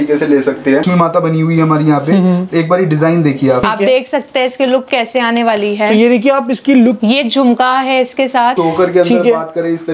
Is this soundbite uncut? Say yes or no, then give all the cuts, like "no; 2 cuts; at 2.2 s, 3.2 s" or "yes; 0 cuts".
no; 4 cuts; at 0.8 s, 3.6 s, 7.0 s, 8.5 s